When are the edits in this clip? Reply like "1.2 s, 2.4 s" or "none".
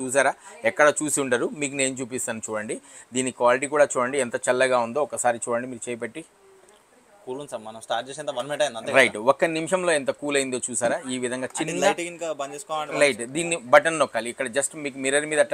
none